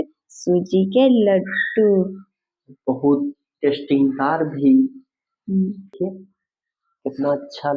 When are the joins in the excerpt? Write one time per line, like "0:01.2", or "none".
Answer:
0:06.0